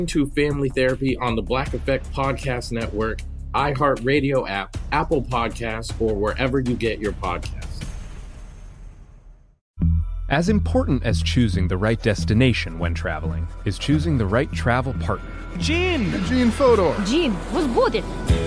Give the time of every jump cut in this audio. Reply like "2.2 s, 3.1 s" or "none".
9.6 s